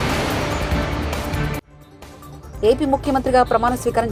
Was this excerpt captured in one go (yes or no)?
yes